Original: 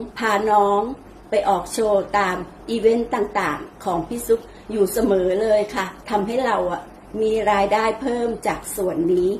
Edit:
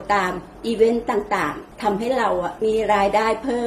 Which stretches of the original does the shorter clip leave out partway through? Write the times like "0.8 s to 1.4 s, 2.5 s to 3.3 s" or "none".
3.7 s to 6.0 s, 6.8 s to 7.1 s